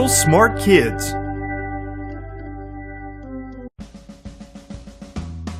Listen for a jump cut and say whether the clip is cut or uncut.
uncut